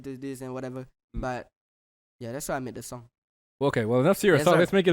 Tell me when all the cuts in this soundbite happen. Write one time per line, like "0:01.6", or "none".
none